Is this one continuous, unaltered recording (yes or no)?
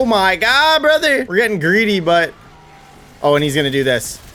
yes